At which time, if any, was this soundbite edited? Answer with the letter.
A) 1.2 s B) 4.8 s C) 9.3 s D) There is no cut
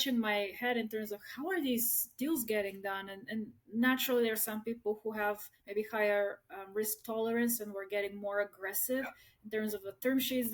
D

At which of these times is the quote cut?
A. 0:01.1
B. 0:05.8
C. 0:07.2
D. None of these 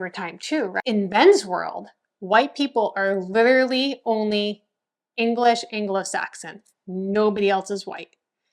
A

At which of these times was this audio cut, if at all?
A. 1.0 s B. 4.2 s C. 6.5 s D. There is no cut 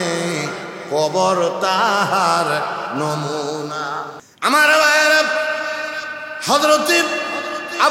B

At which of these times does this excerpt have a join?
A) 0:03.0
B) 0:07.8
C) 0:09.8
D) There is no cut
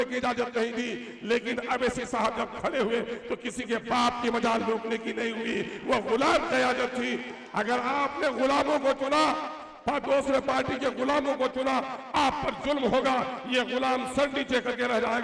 D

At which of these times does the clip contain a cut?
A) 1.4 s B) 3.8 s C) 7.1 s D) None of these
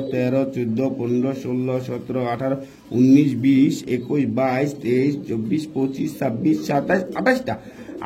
D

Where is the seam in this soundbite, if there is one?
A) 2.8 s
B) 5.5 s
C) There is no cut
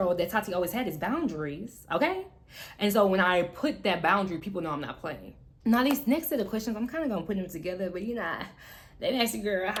C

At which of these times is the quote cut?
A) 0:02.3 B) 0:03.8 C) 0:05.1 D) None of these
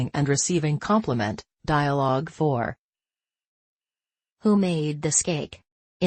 A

